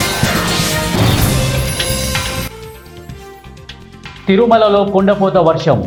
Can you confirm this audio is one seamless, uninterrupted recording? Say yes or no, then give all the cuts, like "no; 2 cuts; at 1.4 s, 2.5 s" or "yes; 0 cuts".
yes; 0 cuts